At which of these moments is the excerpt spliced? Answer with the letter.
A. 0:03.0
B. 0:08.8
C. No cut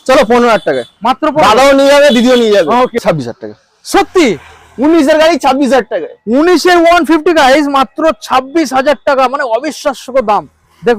A